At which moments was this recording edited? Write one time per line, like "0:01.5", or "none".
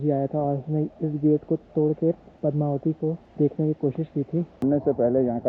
0:02.3
0:03.3
0:04.6